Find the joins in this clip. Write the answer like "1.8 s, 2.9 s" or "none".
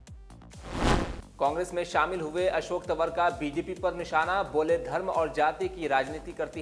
1.2 s